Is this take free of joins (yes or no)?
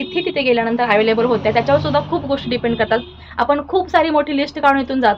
yes